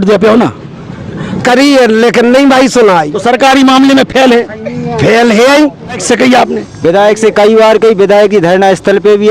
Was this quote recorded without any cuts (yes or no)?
no